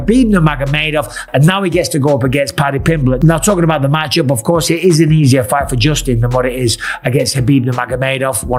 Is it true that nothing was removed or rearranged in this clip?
yes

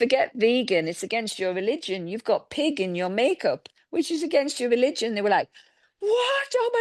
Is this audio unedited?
yes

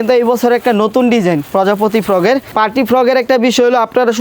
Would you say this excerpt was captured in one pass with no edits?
no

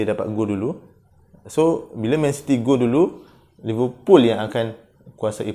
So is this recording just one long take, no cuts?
yes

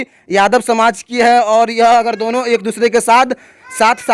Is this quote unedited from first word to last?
yes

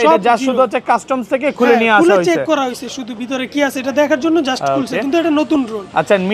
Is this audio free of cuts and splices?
yes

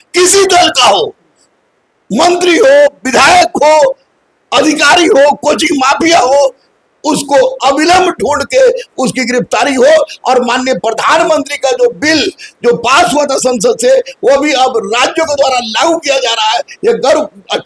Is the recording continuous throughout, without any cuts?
yes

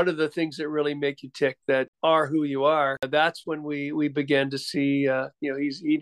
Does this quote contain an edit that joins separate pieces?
yes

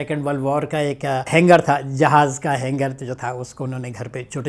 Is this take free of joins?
no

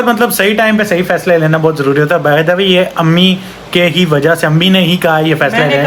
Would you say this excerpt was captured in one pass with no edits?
yes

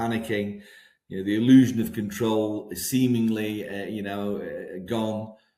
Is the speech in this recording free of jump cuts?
yes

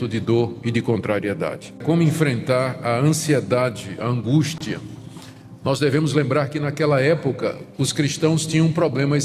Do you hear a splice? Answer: yes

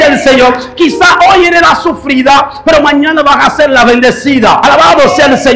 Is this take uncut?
no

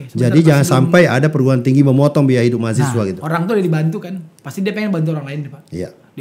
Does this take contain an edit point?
yes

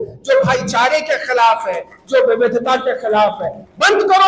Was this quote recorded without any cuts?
yes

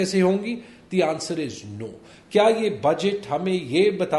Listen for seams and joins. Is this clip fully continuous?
yes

